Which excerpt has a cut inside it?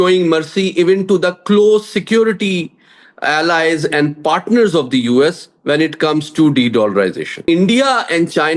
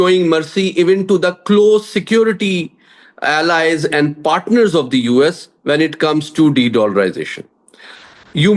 first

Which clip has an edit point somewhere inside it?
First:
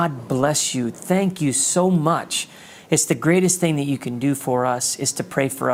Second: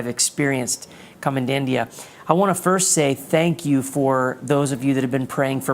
second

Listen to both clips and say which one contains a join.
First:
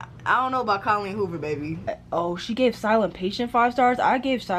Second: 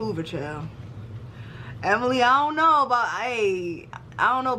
first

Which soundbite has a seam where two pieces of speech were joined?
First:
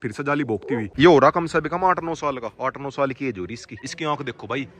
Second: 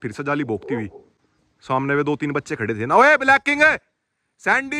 first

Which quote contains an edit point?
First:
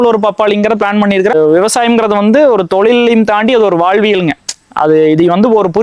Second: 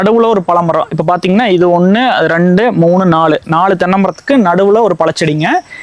first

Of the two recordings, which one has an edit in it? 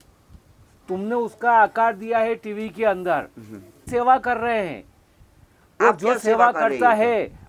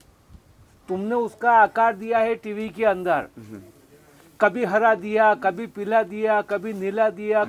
first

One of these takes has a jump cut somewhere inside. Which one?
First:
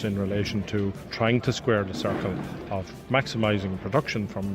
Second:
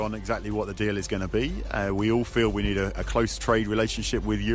first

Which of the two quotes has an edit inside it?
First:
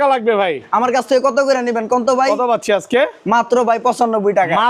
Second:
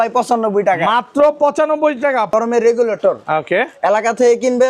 second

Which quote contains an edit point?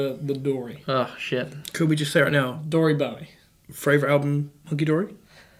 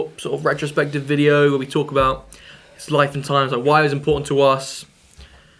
second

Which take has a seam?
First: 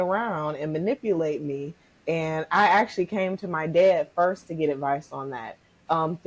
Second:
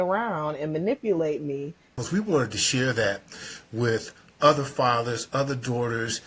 second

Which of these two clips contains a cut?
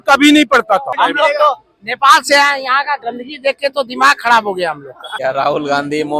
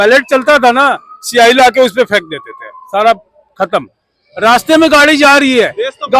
first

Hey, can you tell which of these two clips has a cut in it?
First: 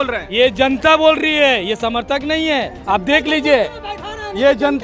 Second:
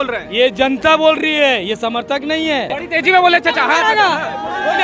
second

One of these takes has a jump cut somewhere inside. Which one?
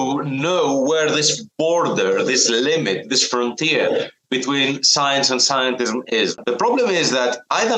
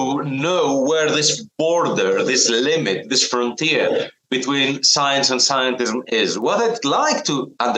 first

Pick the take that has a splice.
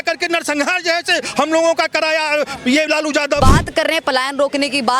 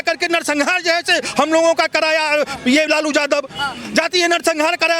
first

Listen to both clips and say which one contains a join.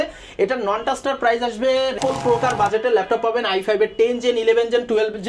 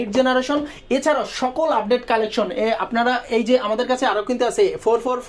first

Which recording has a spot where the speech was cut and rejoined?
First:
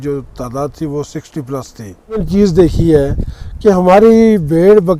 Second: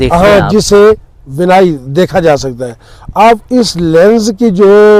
first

